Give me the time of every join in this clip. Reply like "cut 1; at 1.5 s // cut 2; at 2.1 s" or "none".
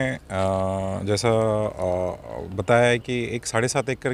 none